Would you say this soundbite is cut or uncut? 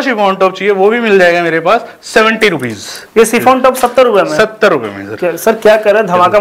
uncut